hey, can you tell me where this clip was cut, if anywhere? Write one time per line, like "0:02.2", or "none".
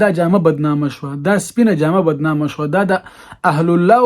none